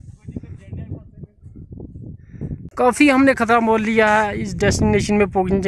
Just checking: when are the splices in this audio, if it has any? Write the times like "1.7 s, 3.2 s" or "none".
2.7 s